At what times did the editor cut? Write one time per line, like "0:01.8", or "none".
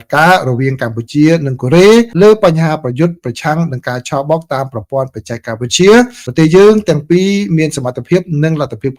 none